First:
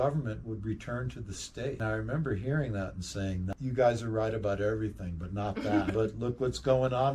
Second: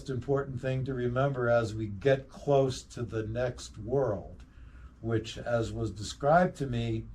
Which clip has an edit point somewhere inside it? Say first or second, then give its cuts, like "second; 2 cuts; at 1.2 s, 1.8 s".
first; 3 cuts; at 1.8 s, 3.5 s, 5.9 s